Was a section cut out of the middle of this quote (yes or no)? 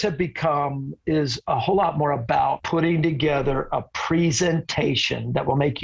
yes